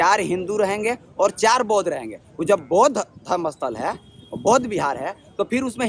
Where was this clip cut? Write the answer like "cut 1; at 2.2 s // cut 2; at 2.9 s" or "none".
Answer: none